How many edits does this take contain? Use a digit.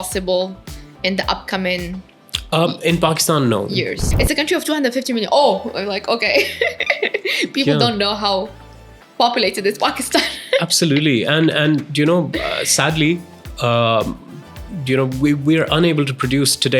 1